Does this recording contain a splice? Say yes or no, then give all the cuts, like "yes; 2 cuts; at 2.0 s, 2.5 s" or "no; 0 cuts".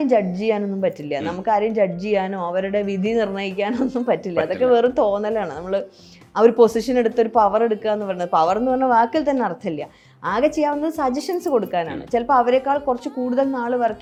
no; 0 cuts